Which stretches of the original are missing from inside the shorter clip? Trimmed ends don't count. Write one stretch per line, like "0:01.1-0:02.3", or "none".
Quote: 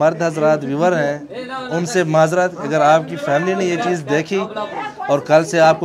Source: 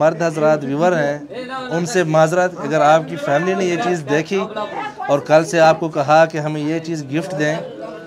none